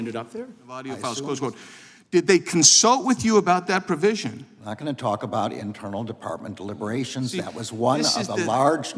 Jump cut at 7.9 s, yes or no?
no